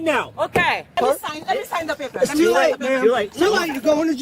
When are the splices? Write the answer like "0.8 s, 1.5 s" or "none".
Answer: 1.0 s